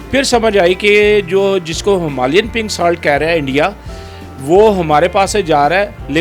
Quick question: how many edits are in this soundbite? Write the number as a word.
zero